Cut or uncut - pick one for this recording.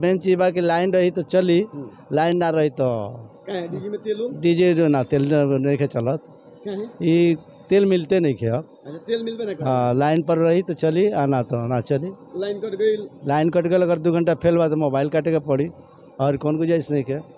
uncut